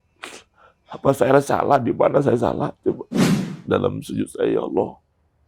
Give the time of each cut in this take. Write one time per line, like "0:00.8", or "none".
0:03.3